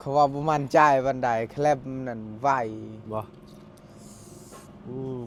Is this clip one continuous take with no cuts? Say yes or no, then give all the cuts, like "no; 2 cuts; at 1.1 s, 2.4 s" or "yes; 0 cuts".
yes; 0 cuts